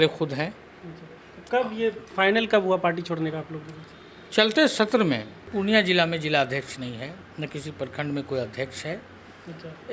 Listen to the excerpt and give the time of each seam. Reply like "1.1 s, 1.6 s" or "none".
5.4 s